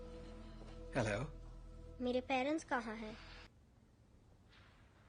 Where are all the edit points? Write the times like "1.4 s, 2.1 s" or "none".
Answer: 3.5 s